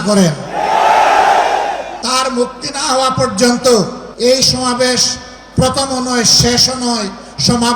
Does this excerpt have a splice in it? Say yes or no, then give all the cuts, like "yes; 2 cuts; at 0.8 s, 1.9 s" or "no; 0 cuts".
yes; 2 cuts; at 1.9 s, 4.0 s